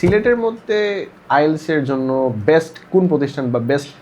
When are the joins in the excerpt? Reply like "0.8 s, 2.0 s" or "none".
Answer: 1.1 s